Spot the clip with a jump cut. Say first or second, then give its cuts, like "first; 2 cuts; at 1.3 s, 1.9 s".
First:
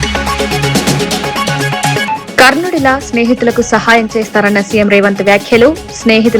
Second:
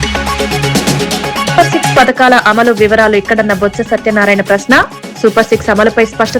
first; 1 cut; at 1.6 s